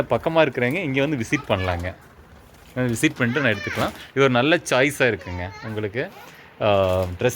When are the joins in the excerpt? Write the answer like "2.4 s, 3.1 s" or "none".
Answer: none